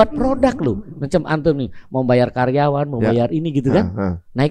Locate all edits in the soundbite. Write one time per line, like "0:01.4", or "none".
none